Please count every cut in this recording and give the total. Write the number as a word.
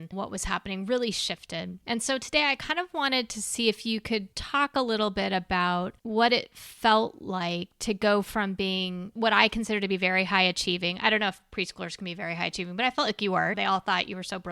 zero